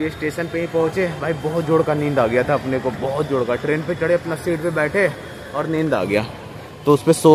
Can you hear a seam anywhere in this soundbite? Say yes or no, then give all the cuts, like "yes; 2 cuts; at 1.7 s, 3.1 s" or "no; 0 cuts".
no; 0 cuts